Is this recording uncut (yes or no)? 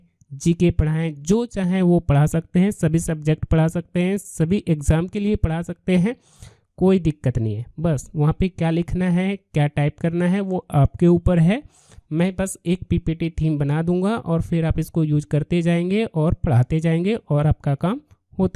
yes